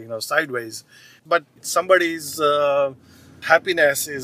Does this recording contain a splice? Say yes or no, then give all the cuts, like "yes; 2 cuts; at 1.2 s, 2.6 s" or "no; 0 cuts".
yes; 1 cut; at 1.3 s